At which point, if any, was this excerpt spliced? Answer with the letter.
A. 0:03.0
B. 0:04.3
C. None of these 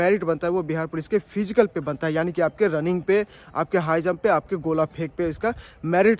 C